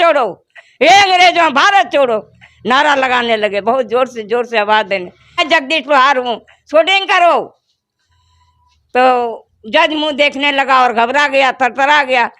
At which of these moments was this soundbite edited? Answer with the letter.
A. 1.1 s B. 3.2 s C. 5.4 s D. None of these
C